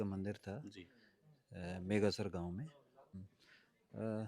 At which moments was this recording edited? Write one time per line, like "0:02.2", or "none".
0:03.2

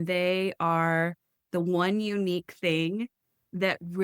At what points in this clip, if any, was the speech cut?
none

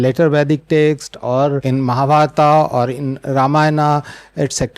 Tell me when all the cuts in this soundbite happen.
0:01.6

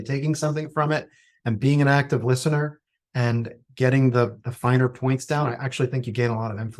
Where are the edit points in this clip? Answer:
none

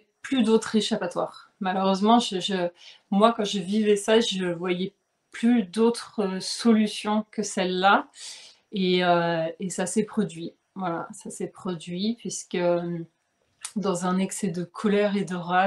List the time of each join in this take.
none

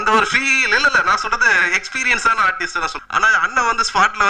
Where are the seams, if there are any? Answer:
0:03.0

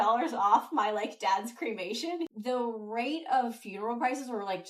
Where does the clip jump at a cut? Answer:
0:02.3

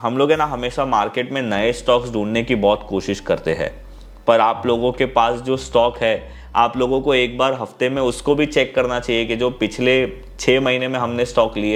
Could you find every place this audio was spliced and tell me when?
none

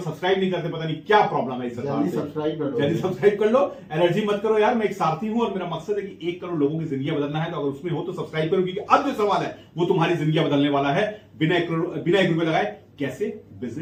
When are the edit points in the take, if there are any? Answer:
none

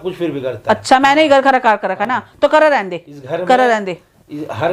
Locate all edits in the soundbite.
none

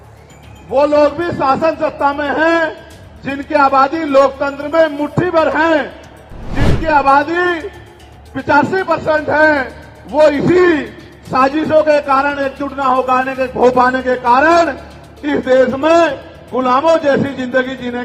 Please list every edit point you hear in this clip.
none

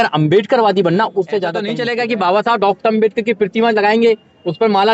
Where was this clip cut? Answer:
0:01.7

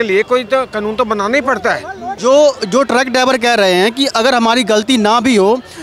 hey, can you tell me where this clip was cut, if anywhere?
0:02.0

